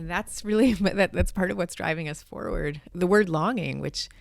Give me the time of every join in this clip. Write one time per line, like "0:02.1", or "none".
0:02.9